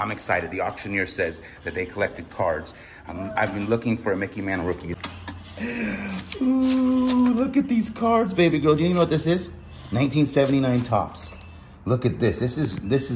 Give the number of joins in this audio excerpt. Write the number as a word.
one